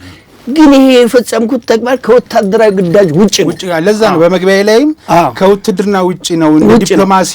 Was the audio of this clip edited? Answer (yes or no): no